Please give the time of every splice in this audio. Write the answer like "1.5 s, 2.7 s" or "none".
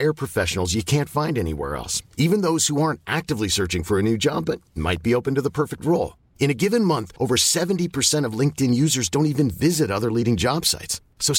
none

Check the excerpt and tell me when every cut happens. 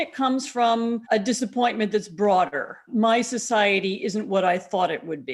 1.0 s, 2.8 s

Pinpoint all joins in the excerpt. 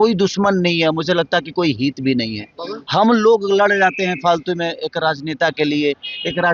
none

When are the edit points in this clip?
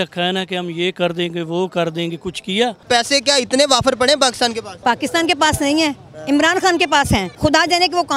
2.8 s, 4.7 s, 7.3 s

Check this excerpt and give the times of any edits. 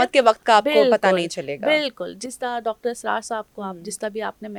none

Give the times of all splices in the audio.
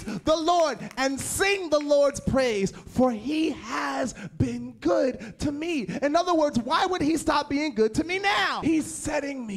8.6 s

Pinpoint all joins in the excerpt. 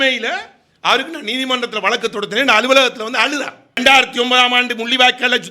3.8 s

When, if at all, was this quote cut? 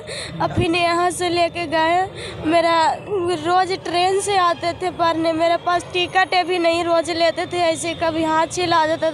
none

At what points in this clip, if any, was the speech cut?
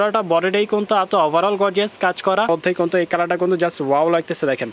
2.5 s

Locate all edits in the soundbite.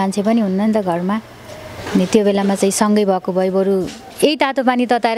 none

